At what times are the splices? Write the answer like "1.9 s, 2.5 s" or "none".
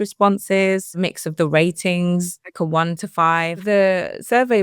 1.0 s, 2.4 s, 3.6 s